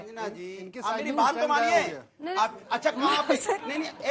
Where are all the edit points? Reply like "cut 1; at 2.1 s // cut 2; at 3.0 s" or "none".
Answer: none